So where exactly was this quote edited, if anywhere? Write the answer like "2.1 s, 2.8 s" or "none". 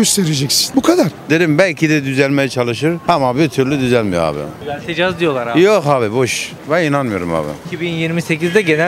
1.1 s, 4.5 s, 7.6 s